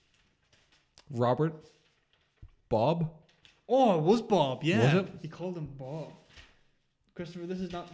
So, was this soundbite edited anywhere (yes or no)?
no